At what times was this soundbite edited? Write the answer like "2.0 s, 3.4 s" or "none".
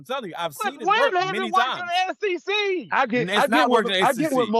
none